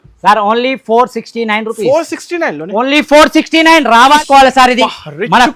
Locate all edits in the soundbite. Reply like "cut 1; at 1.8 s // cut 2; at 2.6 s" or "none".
cut 1; at 4.2 s